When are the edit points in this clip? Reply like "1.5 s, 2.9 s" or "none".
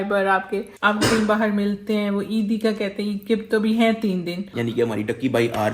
0.8 s, 4.4 s